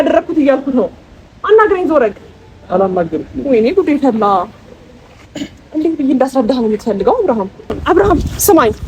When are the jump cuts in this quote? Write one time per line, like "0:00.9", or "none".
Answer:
0:07.8